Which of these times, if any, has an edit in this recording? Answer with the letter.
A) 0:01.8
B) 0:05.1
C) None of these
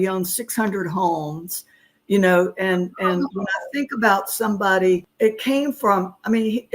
B